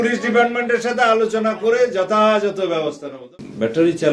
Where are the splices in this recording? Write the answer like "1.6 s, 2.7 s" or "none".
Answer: 3.1 s